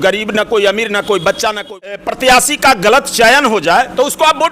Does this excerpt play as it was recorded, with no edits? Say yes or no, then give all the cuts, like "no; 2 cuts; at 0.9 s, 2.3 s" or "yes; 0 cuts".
no; 1 cut; at 1.9 s